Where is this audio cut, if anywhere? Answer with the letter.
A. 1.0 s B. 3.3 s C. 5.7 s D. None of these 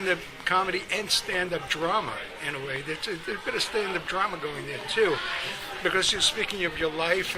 A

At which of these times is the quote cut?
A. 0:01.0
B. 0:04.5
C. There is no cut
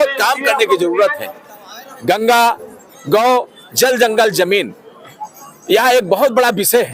C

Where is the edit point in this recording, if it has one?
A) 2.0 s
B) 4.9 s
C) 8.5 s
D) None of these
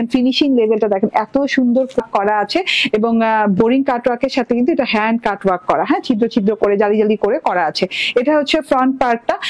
A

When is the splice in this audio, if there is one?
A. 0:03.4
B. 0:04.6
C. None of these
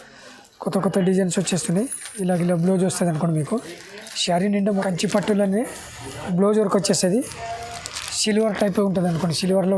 B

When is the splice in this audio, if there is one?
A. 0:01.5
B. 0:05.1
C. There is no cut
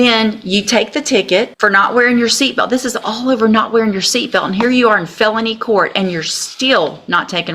A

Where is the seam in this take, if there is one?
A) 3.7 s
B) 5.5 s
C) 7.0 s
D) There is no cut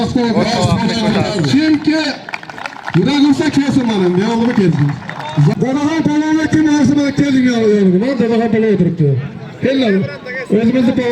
B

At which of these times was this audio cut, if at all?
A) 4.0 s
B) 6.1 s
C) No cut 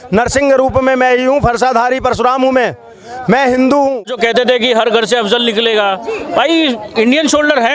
A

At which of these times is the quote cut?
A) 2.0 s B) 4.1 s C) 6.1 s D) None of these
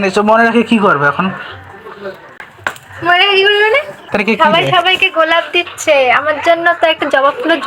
B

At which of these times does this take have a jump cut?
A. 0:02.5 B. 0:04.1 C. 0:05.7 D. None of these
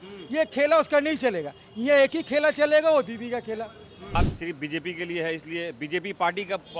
B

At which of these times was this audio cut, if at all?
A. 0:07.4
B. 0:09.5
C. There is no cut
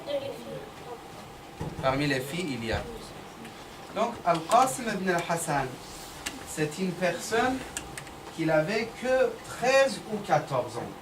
B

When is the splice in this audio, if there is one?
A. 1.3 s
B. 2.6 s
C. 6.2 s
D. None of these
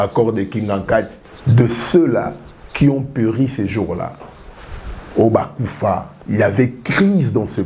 A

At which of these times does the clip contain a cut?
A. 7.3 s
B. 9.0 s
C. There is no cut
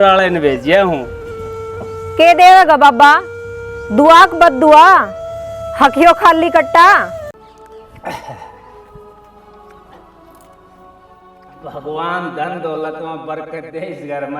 A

